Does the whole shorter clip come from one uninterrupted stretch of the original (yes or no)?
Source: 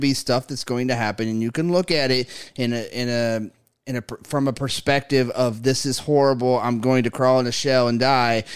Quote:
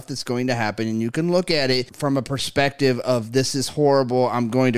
no